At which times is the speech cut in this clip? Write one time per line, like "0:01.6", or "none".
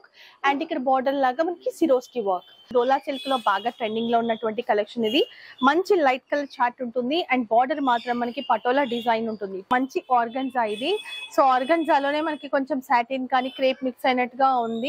0:02.7
0:09.6